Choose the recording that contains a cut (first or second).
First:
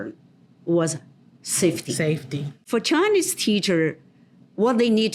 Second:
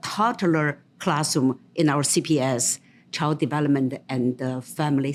first